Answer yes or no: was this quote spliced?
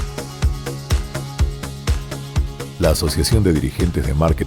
yes